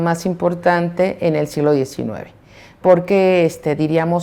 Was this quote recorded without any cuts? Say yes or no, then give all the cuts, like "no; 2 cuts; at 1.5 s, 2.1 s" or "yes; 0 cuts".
yes; 0 cuts